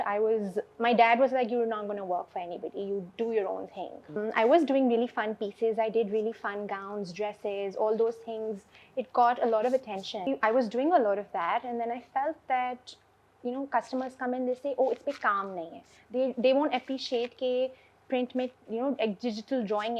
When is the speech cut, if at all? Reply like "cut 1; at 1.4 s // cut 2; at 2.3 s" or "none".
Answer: cut 1; at 4.2 s // cut 2; at 10.3 s